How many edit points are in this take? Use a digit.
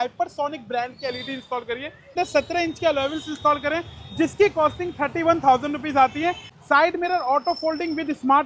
2